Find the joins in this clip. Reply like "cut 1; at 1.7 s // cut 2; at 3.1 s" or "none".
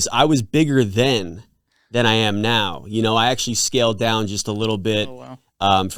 none